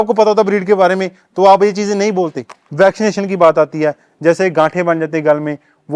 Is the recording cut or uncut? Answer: cut